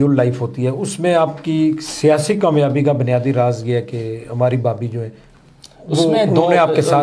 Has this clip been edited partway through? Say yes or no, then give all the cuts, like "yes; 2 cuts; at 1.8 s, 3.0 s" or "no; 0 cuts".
no; 0 cuts